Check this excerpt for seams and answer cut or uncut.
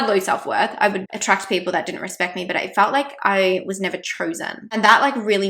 cut